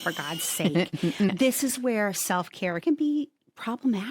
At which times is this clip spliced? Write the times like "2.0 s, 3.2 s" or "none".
2.8 s